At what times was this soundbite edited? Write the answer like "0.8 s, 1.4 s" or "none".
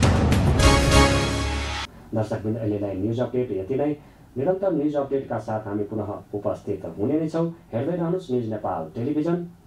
none